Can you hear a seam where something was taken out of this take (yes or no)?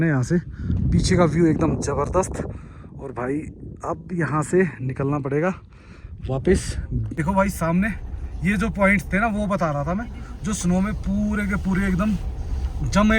yes